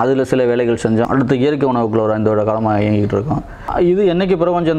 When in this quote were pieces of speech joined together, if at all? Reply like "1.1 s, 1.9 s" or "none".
1.1 s, 3.6 s